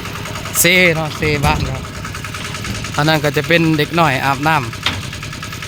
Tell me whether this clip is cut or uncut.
uncut